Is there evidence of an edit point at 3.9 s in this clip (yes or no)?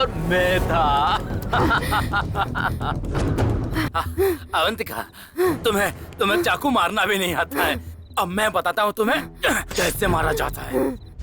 yes